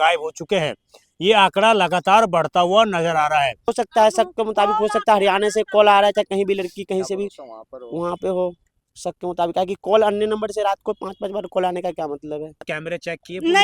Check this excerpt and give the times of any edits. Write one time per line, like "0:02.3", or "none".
0:03.6
0:12.7

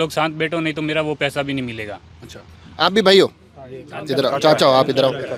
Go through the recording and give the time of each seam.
none

